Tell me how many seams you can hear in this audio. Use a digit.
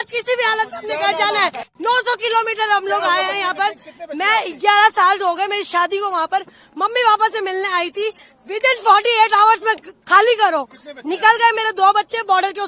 1